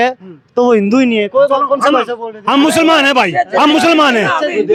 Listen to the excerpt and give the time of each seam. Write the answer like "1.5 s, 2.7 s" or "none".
none